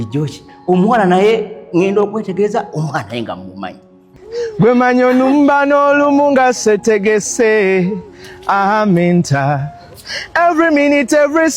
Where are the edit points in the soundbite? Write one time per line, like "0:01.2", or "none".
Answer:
0:04.1